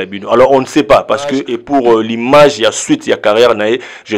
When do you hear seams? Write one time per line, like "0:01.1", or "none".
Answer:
0:01.5